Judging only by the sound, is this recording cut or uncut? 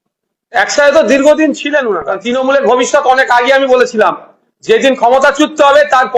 cut